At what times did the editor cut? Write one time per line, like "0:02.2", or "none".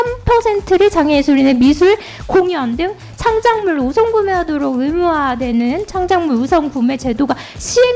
none